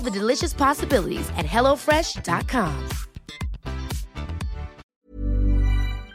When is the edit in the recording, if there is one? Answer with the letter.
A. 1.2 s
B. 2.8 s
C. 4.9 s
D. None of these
C